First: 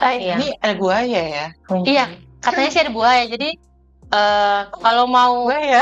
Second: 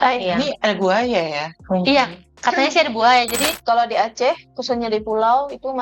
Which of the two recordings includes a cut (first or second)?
second